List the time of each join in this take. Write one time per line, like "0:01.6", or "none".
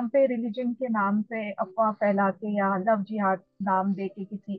none